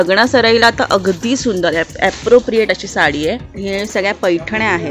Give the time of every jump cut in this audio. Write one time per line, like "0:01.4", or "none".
0:03.5